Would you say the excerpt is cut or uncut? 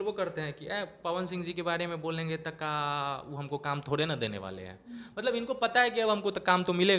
uncut